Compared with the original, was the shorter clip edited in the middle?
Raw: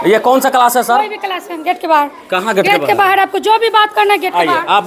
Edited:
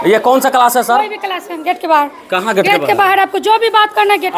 no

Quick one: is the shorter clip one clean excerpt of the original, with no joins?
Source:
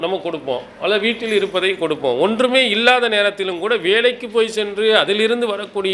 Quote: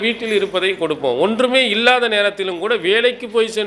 yes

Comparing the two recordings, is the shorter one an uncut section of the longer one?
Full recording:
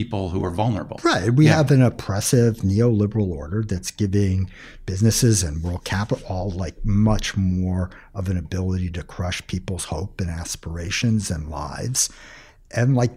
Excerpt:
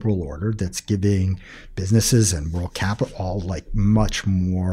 yes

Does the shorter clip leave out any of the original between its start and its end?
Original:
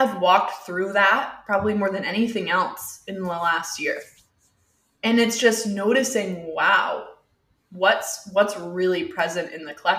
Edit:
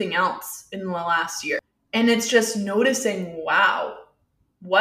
yes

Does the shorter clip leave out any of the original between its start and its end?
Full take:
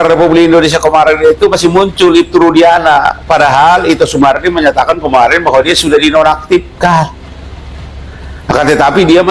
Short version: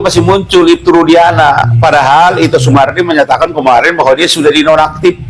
no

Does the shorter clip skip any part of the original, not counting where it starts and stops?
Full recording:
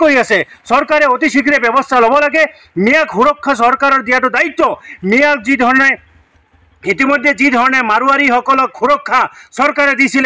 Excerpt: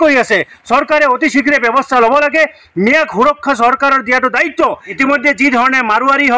yes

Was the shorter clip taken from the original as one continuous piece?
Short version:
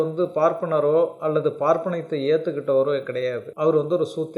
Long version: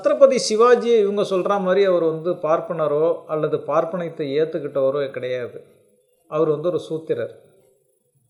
no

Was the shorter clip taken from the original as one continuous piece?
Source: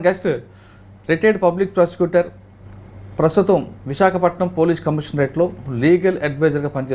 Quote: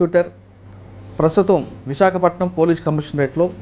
yes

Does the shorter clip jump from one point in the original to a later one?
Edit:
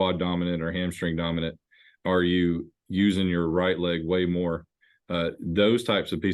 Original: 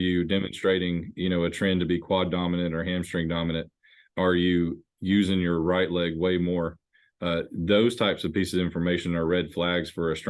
no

